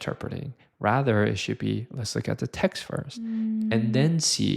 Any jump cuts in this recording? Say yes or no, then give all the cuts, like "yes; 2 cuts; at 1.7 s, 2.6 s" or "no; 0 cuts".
no; 0 cuts